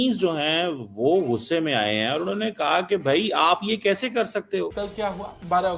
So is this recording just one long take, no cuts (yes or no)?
no